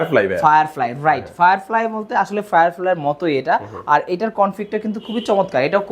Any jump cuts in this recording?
no; 0 cuts

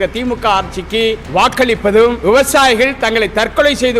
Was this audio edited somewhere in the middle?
yes; 2 cuts; at 1.2 s, 2.2 s

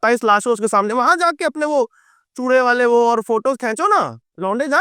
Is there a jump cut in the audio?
no; 0 cuts

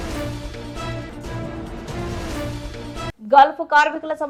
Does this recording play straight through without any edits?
yes; 0 cuts

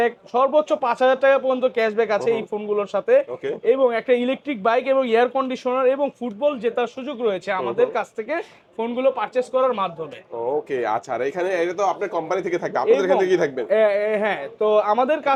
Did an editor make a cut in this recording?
no; 0 cuts

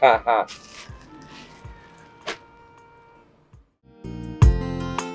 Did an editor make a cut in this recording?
yes; 1 cut; at 4.2 s

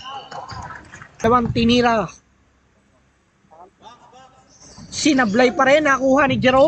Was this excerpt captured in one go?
no; 1 cut; at 1.2 s

